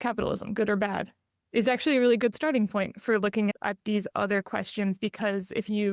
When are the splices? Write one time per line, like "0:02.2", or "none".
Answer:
none